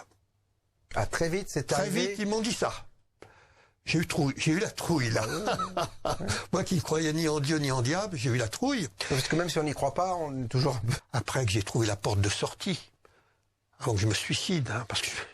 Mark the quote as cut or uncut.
cut